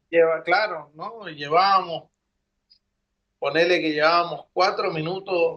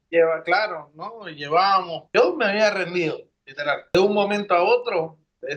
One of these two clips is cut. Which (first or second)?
second